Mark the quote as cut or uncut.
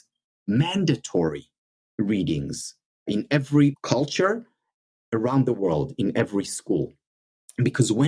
cut